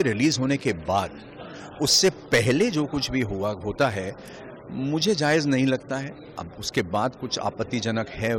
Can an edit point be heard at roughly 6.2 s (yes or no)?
no